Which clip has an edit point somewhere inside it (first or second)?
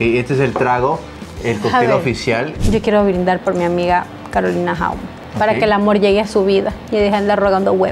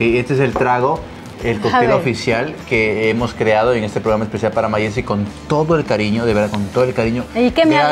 first